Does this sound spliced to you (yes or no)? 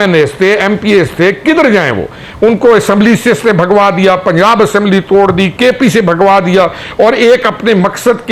no